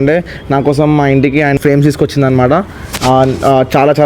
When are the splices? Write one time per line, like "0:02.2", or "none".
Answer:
0:01.6